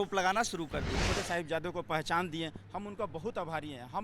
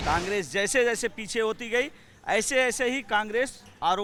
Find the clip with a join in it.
first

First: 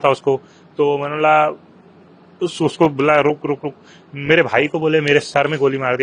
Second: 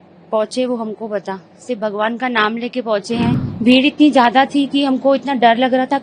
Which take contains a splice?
second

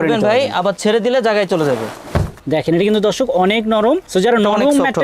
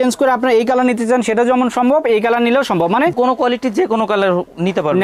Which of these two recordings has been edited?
first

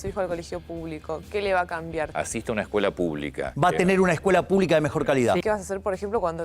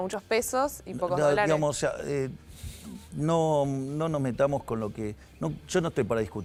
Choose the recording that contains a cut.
first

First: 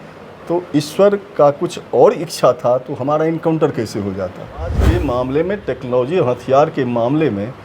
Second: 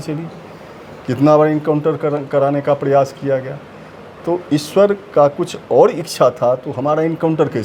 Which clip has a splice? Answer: first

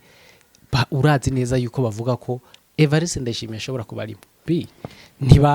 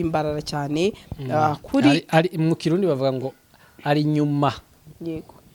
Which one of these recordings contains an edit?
first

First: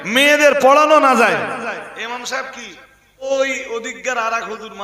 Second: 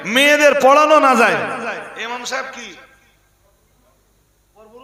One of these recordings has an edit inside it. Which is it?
first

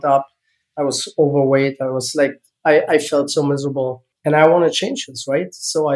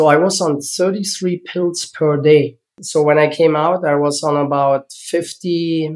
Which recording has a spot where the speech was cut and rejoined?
first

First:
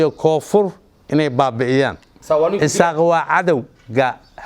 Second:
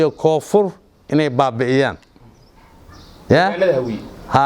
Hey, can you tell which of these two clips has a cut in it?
first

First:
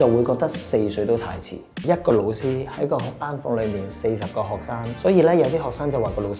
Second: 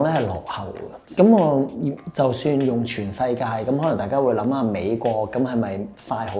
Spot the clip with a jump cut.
first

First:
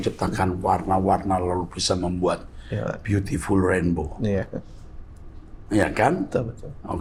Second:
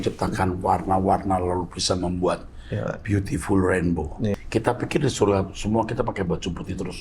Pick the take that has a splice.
second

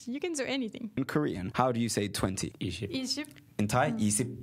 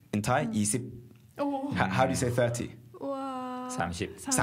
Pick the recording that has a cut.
first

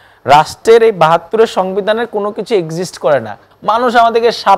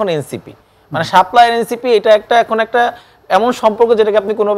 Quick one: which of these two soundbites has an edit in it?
first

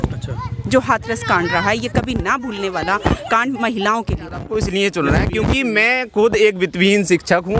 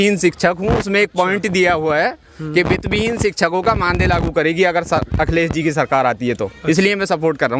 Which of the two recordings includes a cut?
first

